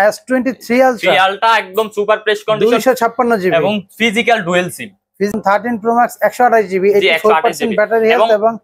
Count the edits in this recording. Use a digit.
1